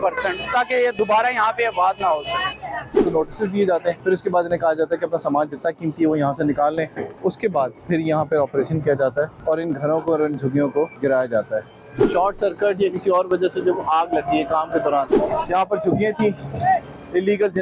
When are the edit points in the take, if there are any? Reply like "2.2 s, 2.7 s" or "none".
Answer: 3.0 s, 4.0 s, 7.5 s, 9.4 s, 10.9 s, 12.1 s, 15.1 s